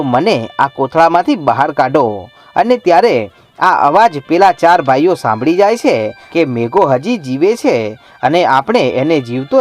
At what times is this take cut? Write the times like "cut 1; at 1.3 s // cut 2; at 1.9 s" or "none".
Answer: cut 1; at 6.2 s